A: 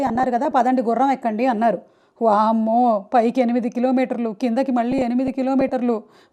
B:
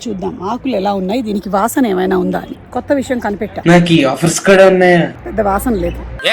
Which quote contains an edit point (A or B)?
B